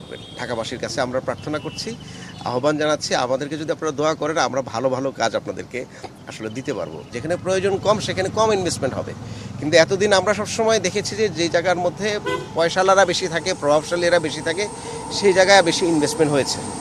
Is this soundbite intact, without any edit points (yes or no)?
no